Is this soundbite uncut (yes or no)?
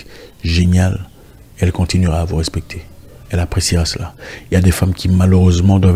yes